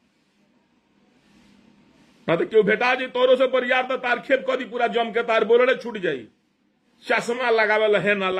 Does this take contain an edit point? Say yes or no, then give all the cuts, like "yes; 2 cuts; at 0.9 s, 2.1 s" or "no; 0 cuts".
no; 0 cuts